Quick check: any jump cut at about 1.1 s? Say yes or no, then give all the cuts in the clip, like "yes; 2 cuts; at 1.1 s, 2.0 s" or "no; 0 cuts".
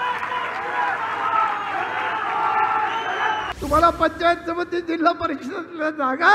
no; 1 cut; at 3.5 s